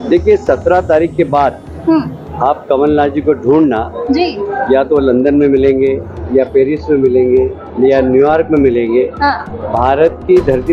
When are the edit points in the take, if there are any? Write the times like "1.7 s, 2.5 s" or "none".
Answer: none